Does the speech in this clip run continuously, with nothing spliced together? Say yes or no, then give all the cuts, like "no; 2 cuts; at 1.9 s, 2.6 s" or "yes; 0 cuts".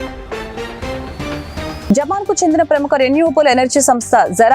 no; 1 cut; at 1.8 s